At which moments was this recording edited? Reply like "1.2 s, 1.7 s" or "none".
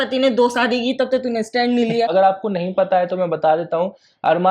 2.1 s